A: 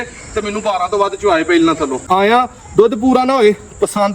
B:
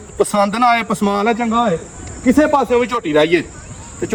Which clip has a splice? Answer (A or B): A